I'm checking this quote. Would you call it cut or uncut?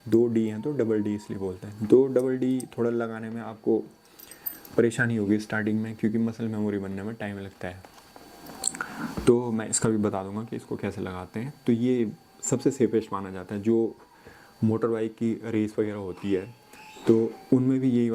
uncut